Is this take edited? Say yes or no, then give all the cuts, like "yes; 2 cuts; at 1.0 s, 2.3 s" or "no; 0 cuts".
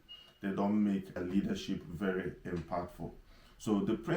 yes; 1 cut; at 1.2 s